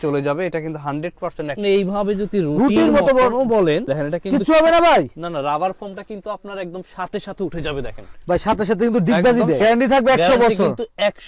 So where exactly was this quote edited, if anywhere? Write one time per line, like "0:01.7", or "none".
0:01.6
0:09.6